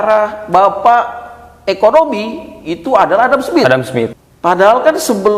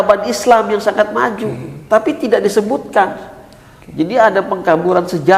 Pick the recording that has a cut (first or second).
first